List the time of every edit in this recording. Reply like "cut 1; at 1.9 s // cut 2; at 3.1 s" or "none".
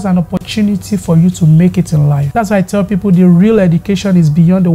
cut 1; at 2.2 s